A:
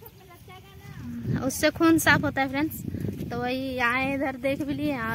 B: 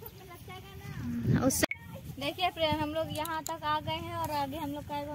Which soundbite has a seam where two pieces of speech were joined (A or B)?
B